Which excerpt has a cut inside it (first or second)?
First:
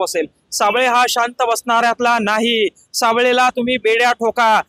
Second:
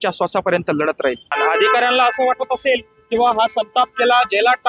second